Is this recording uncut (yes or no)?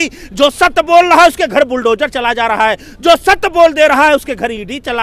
yes